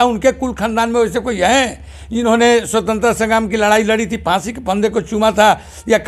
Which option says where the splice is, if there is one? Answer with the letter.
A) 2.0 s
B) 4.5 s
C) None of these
C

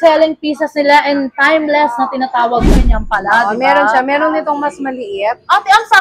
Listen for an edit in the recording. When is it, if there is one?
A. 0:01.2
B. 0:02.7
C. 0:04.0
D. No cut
B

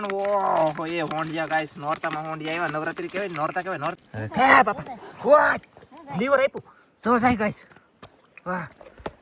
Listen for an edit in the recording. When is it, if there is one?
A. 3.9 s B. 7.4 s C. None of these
A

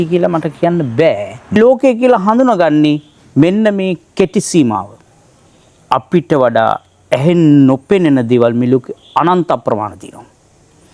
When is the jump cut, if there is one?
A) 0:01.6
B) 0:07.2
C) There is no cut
A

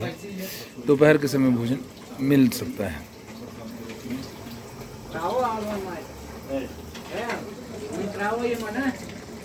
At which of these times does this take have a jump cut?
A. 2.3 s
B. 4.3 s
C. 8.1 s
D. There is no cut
B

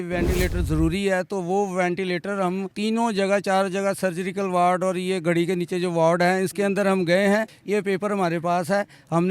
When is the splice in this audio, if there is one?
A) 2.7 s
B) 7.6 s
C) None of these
B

